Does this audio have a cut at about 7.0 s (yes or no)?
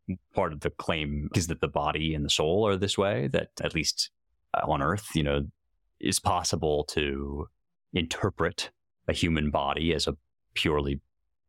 no